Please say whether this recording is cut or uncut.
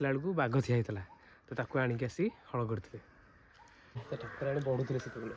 cut